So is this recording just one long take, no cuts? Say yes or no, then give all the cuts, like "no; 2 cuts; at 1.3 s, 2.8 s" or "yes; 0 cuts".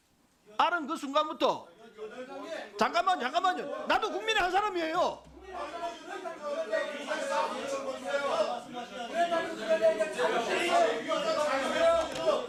yes; 0 cuts